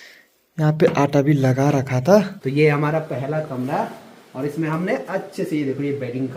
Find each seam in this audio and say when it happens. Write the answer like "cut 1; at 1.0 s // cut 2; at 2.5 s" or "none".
cut 1; at 2.4 s